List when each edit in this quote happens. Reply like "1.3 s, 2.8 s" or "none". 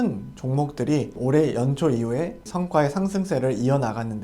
1.1 s, 2.4 s